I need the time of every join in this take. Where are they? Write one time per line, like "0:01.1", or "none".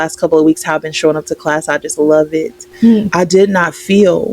0:03.1